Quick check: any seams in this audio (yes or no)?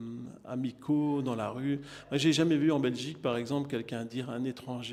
no